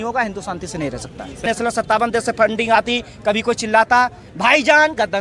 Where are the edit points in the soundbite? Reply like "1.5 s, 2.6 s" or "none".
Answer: 1.4 s

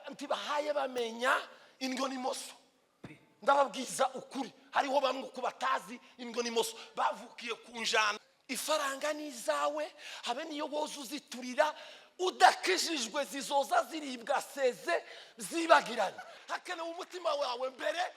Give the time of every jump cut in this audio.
8.2 s, 16.3 s

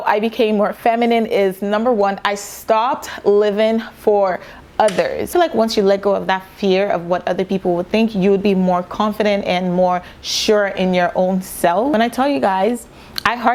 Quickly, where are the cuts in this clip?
none

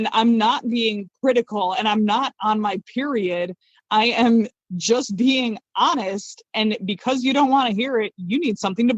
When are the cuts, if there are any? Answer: none

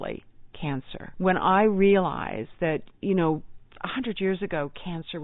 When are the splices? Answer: 1.0 s

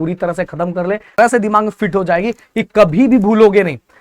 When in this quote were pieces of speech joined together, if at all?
1.2 s

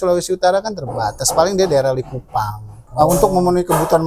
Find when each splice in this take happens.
2.8 s

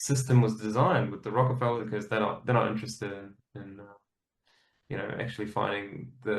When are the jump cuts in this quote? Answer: 1.8 s

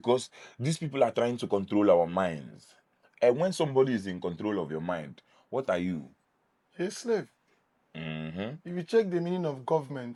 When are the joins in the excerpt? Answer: none

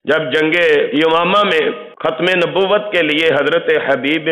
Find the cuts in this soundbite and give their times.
0.9 s, 1.9 s

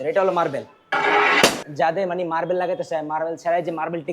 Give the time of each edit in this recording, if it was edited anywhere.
1.6 s

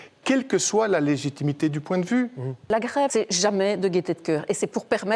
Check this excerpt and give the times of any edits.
2.6 s

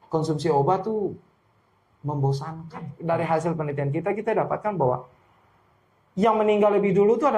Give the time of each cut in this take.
2.9 s

